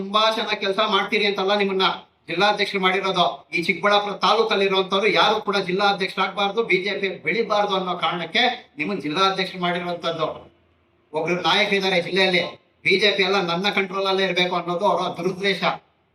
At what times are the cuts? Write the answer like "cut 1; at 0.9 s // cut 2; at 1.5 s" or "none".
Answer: none